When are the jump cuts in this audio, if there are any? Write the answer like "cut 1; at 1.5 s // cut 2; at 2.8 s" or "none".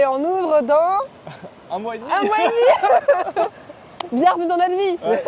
none